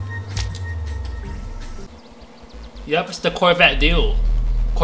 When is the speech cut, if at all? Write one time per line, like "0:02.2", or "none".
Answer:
0:01.9